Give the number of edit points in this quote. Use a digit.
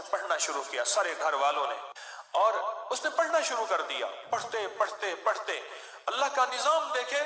1